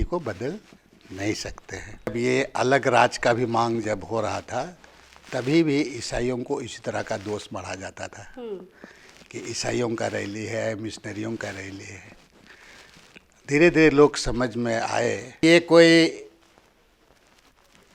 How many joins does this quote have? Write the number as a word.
two